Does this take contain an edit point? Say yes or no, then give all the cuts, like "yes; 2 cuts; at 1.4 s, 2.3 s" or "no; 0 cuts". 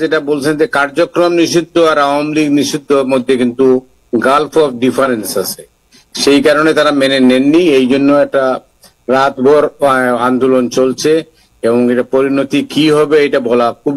no; 0 cuts